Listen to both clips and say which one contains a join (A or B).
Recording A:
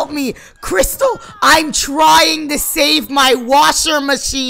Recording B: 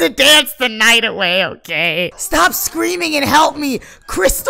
B